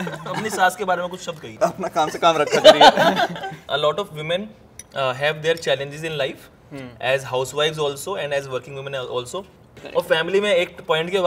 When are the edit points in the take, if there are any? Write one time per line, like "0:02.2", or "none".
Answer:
0:03.6